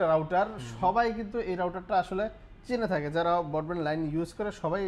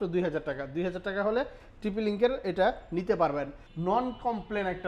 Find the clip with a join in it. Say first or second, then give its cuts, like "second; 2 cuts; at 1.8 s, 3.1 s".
second; 1 cut; at 3.6 s